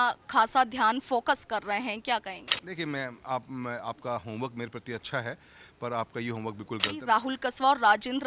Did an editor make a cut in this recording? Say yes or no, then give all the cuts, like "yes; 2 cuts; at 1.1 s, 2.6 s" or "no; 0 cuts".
yes; 1 cut; at 6.9 s